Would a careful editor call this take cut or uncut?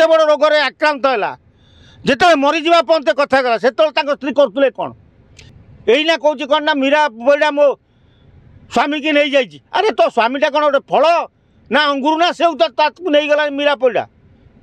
uncut